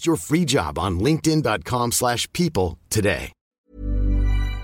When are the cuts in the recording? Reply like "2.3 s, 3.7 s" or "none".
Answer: 3.6 s

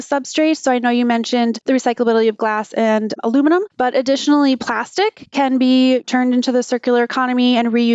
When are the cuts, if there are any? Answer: 1.6 s, 3.6 s, 6.0 s

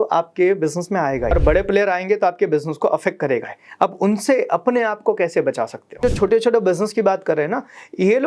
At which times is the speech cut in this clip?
1.3 s, 6.0 s

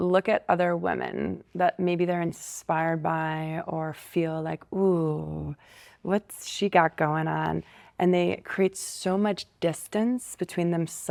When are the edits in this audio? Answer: none

